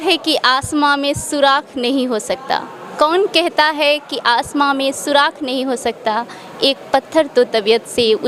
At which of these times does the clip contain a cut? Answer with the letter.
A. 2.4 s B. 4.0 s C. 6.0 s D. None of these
D